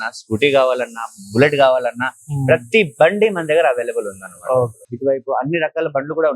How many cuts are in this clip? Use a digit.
1